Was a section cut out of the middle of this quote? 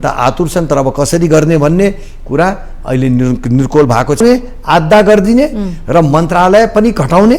yes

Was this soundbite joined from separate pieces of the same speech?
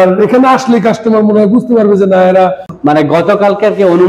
yes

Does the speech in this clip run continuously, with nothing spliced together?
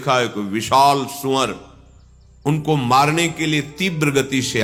yes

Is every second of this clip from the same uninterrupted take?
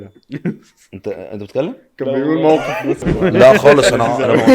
no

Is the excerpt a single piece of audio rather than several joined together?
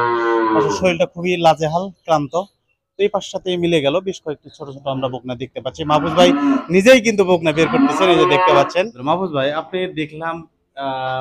no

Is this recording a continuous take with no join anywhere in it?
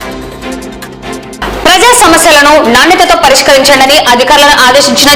yes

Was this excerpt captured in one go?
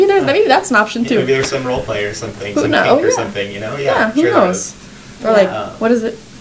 yes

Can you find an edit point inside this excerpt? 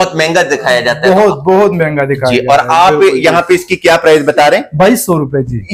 no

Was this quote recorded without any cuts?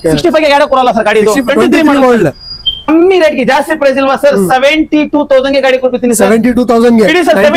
no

